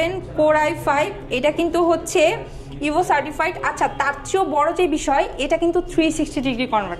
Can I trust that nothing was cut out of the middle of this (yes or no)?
yes